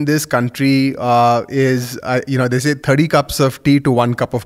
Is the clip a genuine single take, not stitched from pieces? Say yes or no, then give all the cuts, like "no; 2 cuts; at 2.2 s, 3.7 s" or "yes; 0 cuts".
yes; 0 cuts